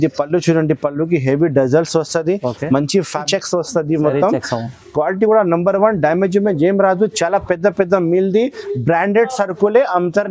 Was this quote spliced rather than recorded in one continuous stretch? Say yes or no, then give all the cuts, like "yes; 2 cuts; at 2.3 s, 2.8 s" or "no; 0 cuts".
yes; 1 cut; at 3.2 s